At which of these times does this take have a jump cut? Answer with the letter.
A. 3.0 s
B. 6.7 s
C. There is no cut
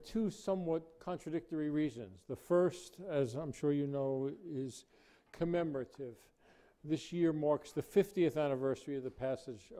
B